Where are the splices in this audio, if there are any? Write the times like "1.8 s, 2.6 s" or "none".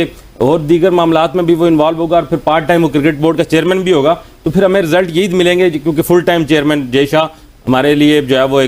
none